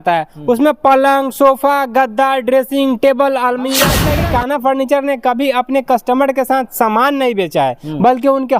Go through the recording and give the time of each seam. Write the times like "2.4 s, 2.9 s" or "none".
4.1 s

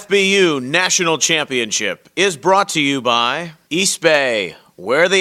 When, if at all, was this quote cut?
3.5 s

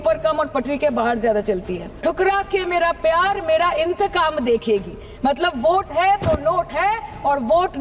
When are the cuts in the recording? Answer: 1.8 s

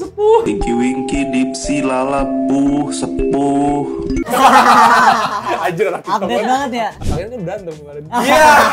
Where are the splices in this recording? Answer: 7.0 s

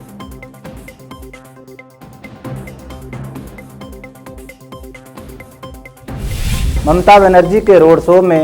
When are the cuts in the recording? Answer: 0.9 s

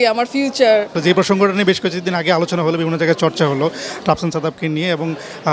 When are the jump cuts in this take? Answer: 0.9 s

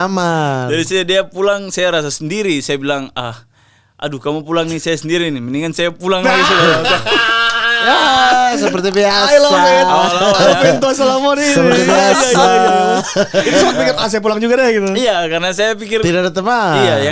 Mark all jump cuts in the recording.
none

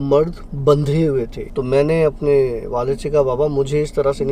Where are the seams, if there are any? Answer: 1.4 s

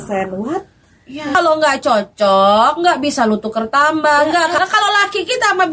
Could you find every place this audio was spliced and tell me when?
1.4 s, 4.5 s

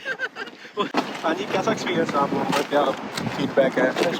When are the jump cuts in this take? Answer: 0.9 s

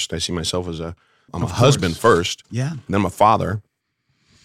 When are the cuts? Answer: 1.3 s

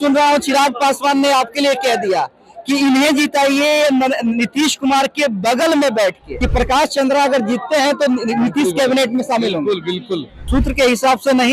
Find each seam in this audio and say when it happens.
6.3 s, 10.4 s

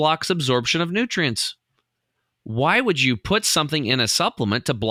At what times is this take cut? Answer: none

